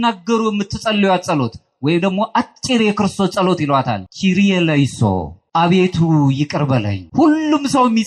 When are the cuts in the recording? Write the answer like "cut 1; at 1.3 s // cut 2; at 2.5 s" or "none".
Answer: cut 1; at 4.0 s // cut 2; at 5.4 s // cut 3; at 7.0 s